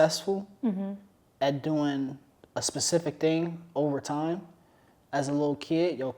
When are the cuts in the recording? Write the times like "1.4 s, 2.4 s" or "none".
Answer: none